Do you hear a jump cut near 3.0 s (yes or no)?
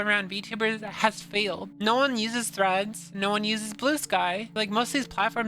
no